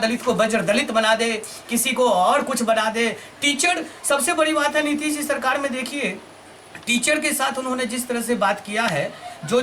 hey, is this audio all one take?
yes; 0 cuts

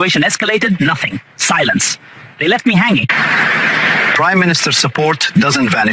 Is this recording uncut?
yes; 0 cuts

